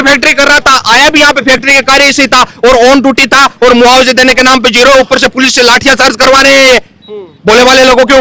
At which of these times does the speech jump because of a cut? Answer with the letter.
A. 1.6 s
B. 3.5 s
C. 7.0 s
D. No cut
D